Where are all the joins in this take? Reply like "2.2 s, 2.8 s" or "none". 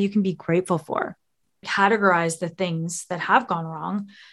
1.7 s